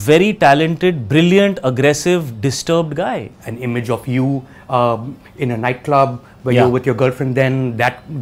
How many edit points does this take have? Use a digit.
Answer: 1